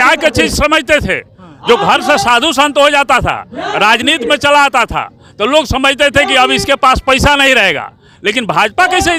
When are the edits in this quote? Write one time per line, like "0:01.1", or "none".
none